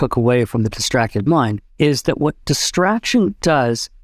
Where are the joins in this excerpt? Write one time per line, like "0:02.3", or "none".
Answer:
0:01.6

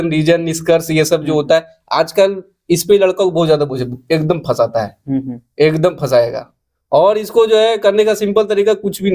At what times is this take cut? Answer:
none

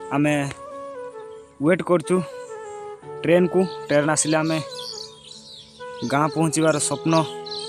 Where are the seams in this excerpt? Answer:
none

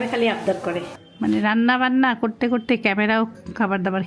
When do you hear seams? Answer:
0:01.0

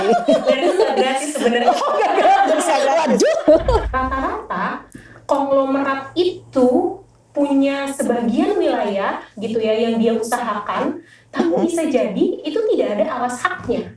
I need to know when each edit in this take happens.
0:03.8

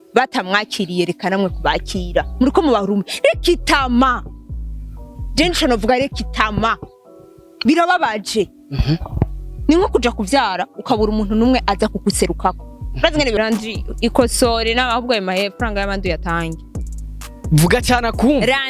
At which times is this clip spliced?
0:13.4

